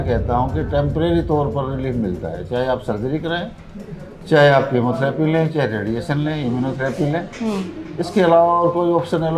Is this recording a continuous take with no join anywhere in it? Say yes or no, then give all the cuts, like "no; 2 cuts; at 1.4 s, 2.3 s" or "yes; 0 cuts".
yes; 0 cuts